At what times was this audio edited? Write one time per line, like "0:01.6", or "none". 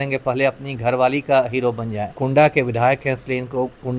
0:02.2